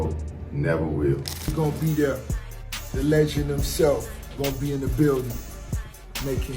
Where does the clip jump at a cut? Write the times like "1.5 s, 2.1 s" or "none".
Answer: 1.4 s